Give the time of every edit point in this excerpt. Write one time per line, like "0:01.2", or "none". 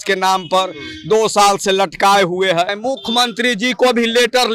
0:02.7